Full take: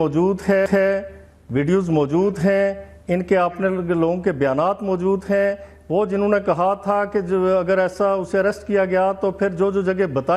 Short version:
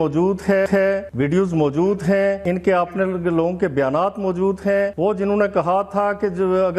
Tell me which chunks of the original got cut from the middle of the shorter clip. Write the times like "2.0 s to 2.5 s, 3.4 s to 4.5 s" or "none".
1.1 s to 1.4 s, 2.8 s to 3.0 s, 5.6 s to 5.9 s